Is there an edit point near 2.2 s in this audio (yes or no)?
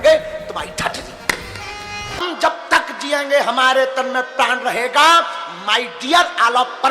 yes